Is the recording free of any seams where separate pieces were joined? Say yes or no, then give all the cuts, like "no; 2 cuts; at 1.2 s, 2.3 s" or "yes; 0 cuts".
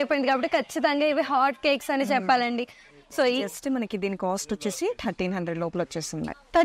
no; 1 cut; at 2.8 s